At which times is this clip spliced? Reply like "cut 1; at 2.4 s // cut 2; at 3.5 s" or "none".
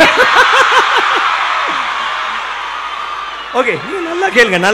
none

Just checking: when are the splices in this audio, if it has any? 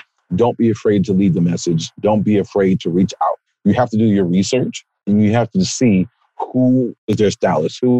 cut 1; at 3.5 s // cut 2; at 7.0 s

